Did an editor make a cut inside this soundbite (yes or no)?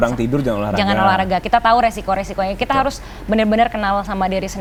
no